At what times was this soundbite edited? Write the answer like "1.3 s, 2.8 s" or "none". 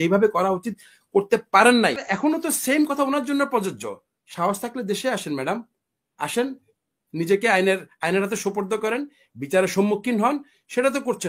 2.0 s